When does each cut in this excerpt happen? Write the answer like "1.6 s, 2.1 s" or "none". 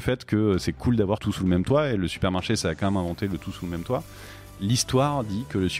1.3 s, 4.5 s